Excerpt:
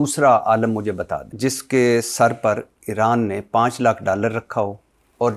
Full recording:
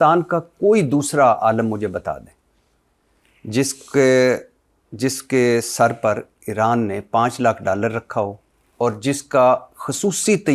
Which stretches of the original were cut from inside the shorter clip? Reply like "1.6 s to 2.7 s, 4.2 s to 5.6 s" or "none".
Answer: 2.2 s to 4.8 s